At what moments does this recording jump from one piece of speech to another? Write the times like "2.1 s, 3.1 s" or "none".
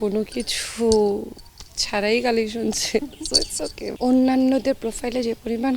3.8 s